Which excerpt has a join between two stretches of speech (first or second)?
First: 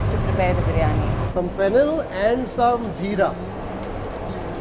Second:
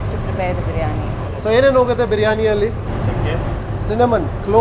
first